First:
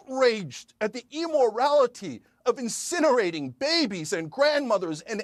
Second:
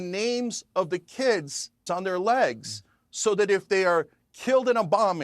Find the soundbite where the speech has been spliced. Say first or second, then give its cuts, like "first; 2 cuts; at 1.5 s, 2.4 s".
second; 1 cut; at 1.8 s